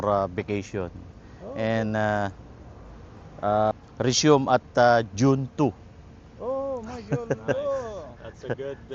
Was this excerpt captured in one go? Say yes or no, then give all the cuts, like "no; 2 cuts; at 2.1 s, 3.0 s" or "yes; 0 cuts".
no; 1 cut; at 3.7 s